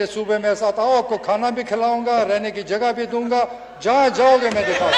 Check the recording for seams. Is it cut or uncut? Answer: uncut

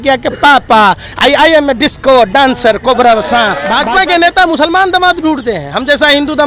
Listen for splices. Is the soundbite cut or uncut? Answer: cut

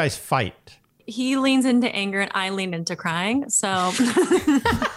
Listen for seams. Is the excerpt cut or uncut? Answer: cut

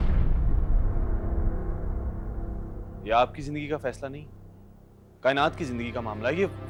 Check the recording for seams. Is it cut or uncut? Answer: uncut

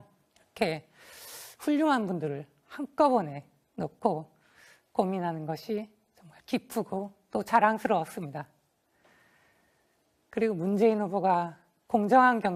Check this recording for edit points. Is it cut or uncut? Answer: uncut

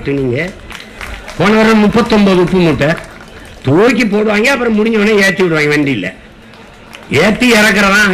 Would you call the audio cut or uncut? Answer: uncut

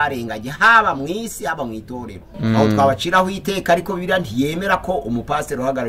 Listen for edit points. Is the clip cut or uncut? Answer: cut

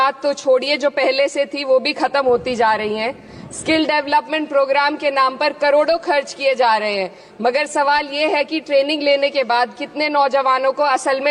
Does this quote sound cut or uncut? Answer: uncut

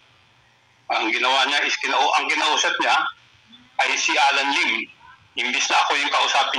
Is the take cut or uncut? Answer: uncut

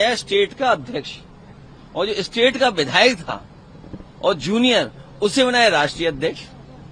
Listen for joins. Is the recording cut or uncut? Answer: uncut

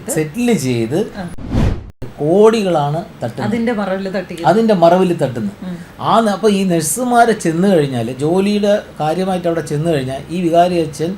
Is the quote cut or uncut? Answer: cut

